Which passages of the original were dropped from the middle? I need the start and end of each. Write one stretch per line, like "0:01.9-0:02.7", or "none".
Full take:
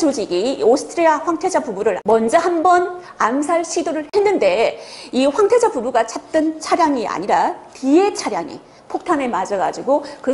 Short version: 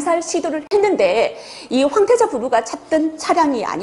none